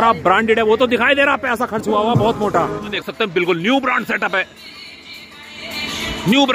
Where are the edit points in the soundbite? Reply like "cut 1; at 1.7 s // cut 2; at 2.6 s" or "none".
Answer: cut 1; at 2.9 s